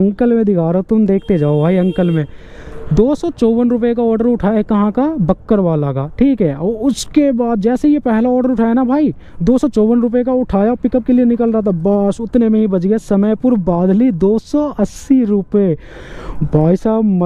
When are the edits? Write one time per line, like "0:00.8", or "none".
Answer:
none